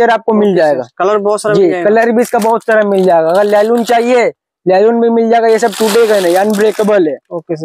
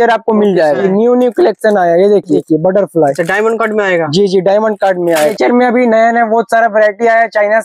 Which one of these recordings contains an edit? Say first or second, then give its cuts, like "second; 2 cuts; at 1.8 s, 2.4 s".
second; 3 cuts; at 0.8 s, 2.4 s, 5.3 s